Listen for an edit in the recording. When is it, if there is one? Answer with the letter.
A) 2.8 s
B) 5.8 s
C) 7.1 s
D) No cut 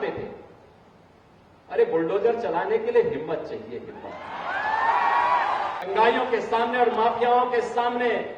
B